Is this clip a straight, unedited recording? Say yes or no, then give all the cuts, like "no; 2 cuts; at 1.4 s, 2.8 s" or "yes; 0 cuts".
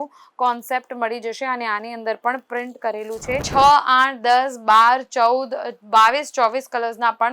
no; 1 cut; at 3.5 s